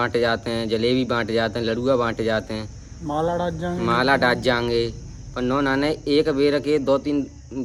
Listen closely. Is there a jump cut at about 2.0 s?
no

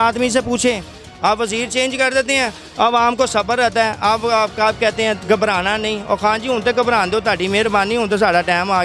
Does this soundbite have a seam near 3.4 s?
no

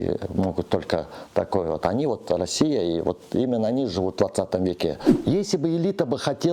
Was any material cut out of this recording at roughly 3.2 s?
no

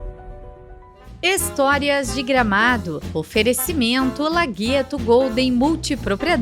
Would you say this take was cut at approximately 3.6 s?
no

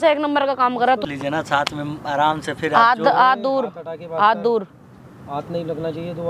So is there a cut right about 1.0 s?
yes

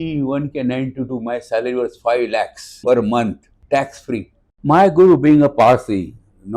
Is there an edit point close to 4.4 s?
yes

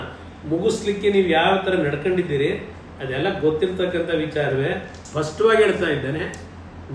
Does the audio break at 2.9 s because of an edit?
no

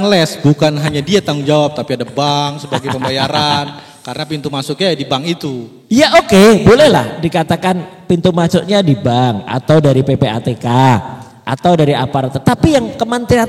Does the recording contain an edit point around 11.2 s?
no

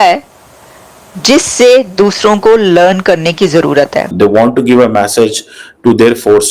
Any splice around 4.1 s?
yes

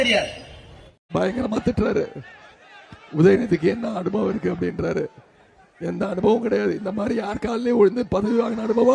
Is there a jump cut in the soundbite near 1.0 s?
yes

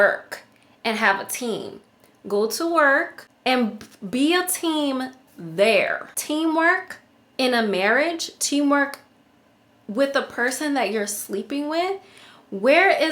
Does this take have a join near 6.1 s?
yes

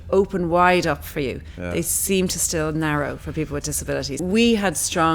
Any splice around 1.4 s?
no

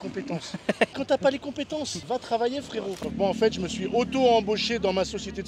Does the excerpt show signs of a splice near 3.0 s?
yes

